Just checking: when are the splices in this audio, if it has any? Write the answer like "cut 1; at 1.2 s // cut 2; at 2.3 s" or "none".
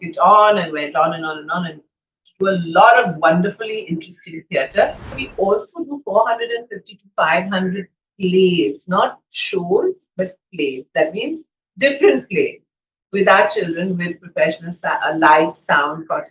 cut 1; at 5.2 s